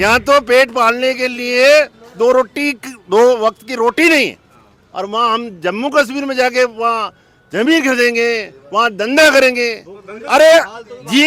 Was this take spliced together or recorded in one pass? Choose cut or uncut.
uncut